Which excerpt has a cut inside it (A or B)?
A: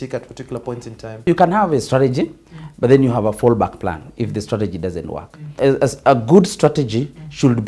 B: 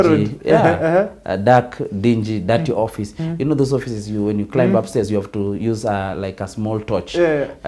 A